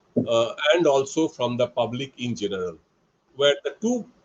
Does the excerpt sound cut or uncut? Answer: cut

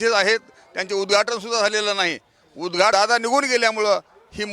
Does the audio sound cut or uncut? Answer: cut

